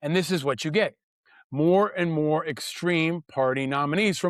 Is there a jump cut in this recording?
no; 0 cuts

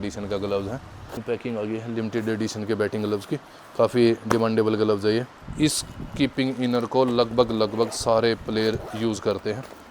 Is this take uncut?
no; 2 cuts; at 1.2 s, 5.4 s

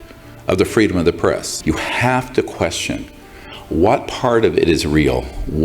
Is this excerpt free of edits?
no; 1 cut; at 1.5 s

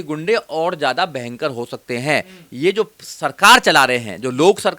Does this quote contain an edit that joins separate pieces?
no; 0 cuts

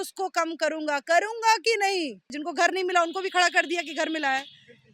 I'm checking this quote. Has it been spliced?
yes; 1 cut; at 2.3 s

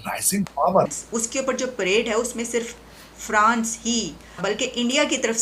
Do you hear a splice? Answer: yes; 2 cuts; at 0.9 s, 4.4 s

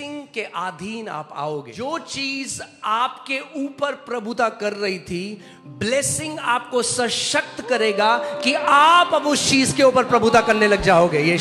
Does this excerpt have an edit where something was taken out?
yes; 1 cut; at 1.7 s

